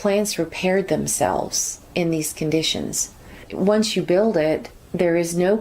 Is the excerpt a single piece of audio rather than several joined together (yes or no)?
no